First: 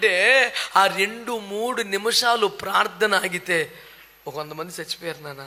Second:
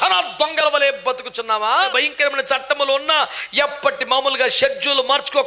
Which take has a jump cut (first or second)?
second